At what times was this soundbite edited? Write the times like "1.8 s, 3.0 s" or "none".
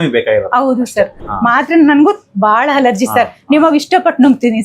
1.2 s

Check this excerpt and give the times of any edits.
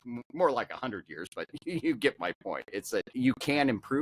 3.1 s

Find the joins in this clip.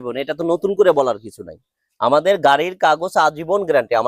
none

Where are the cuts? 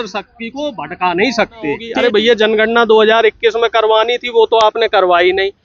1.9 s

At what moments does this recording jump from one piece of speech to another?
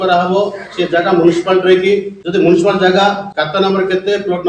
2.2 s, 3.3 s

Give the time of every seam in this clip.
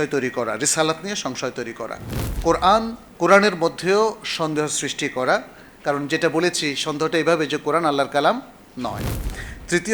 2.3 s, 3.0 s

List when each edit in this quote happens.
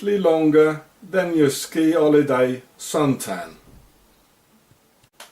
0.9 s

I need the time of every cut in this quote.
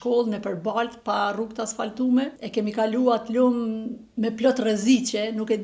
2.4 s

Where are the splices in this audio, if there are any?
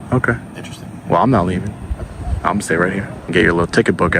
3.2 s

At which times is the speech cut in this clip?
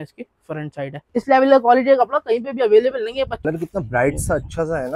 1.1 s, 3.5 s

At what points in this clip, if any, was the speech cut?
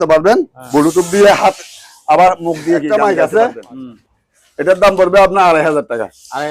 2.9 s

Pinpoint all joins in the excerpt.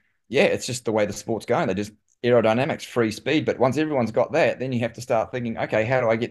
none

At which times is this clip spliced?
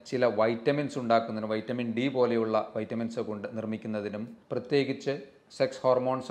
4.4 s

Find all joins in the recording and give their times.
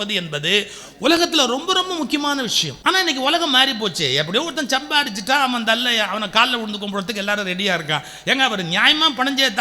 2.7 s

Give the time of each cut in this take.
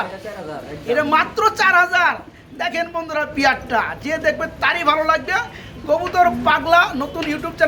none

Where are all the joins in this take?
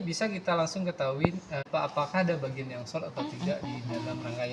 1.7 s

